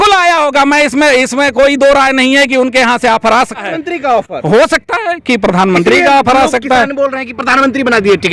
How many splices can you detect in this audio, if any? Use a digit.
1